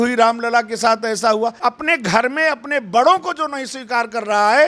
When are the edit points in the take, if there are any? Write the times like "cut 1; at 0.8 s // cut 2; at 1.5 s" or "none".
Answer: cut 1; at 1.6 s